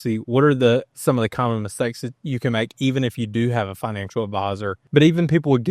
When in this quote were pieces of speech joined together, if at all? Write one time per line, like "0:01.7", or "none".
0:04.8